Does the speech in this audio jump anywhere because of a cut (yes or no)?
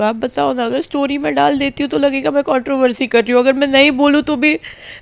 no